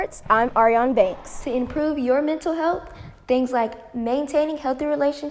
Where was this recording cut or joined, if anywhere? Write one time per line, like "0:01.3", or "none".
0:01.3